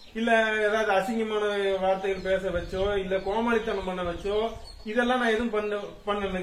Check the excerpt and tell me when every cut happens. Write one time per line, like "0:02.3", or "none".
none